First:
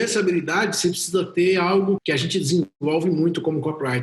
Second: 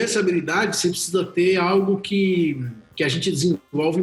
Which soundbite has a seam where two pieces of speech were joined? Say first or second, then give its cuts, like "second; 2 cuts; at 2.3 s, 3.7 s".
first; 1 cut; at 2.0 s